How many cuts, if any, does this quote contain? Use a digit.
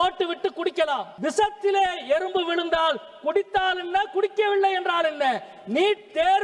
1